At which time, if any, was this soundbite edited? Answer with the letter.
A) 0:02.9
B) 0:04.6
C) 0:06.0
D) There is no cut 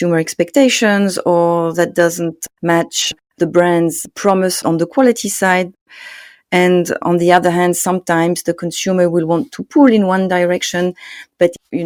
D